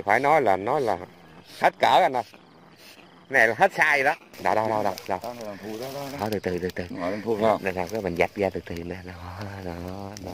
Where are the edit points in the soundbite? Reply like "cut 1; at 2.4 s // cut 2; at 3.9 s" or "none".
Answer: cut 1; at 4.3 s